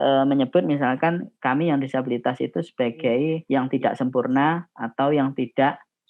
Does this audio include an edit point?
yes; 1 cut; at 3.4 s

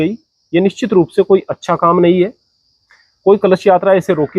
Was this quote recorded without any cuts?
yes; 0 cuts

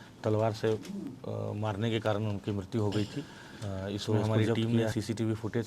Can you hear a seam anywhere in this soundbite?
yes; 1 cut; at 4.6 s

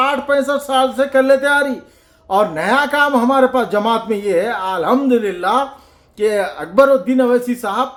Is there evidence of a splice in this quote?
no; 0 cuts

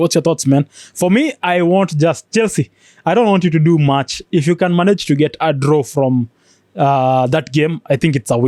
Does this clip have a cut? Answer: no; 0 cuts

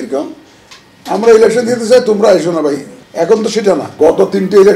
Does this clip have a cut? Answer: yes; 2 cuts; at 3.0 s, 3.9 s

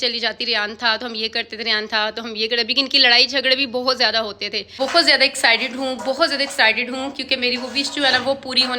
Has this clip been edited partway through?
yes; 1 cut; at 4.8 s

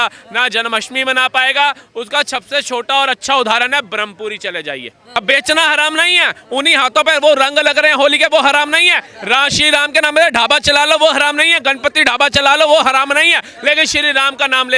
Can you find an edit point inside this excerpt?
yes; 1 cut; at 5.2 s

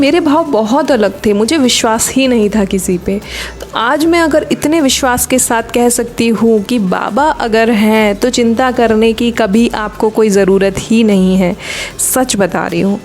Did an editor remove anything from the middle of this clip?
no; 0 cuts

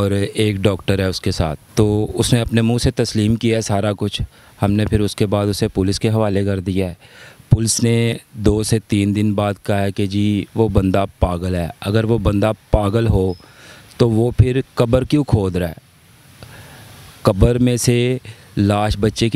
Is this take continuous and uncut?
no; 1 cut; at 1.6 s

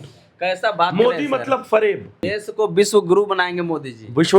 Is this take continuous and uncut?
no; 1 cut; at 2.3 s

